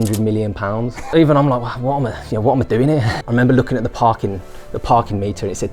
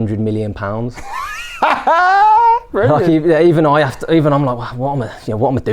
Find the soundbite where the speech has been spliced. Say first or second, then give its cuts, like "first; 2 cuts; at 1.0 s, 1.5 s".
first; 2 cuts; at 1.0 s, 3.2 s